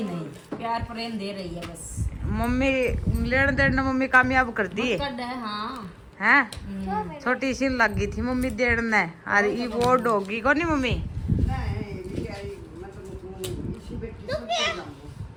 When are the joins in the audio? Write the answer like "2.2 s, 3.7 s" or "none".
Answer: none

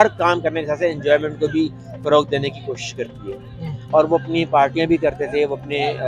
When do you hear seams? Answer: none

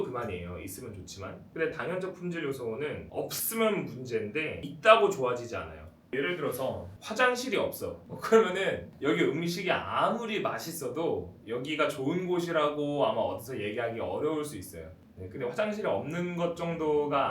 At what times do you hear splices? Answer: 1.4 s, 3.0 s, 4.6 s, 6.1 s, 6.9 s, 8.1 s, 8.9 s

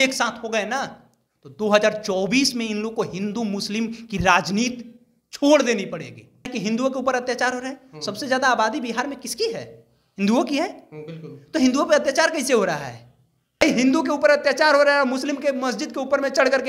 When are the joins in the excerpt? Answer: 6.5 s, 13.6 s

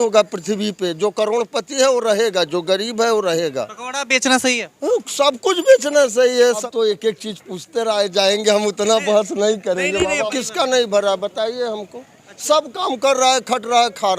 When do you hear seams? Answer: 6.6 s, 10.3 s

